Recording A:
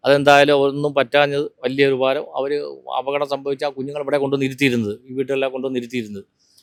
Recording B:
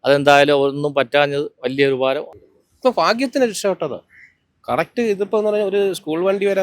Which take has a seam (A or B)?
B